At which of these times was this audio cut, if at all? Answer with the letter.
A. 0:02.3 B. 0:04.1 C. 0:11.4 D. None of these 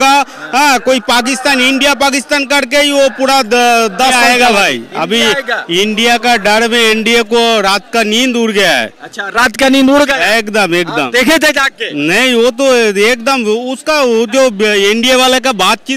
B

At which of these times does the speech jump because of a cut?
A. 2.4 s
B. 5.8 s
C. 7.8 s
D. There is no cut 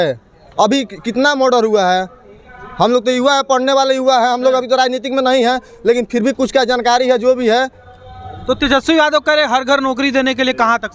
D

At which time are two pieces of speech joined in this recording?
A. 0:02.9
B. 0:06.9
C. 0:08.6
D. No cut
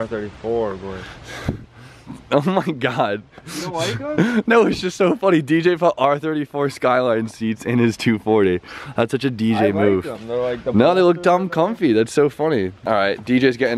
B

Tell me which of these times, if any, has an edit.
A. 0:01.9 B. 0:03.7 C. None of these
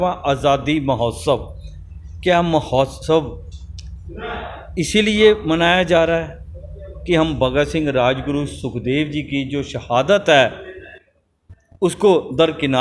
C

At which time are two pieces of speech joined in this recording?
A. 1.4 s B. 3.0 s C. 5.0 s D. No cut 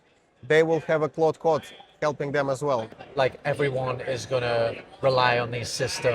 B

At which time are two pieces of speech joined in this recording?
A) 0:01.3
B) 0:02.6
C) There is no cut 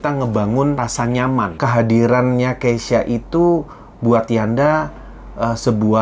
A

